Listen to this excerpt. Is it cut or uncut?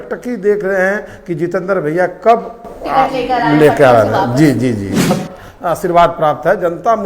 cut